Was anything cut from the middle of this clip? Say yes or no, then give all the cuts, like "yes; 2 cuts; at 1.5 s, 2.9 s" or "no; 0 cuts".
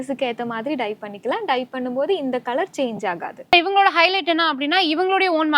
yes; 1 cut; at 3.5 s